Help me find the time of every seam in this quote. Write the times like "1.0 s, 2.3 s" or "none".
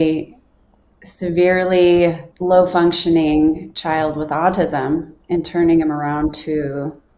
2.3 s